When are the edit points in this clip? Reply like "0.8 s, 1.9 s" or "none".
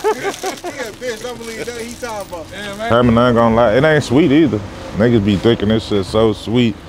2.9 s